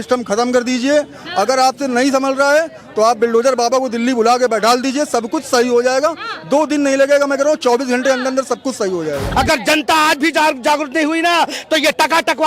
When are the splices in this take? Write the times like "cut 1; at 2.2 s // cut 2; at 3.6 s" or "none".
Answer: cut 1; at 9.3 s